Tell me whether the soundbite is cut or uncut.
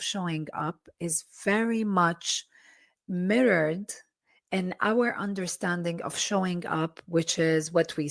uncut